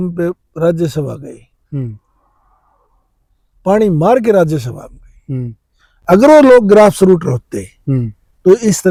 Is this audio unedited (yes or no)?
yes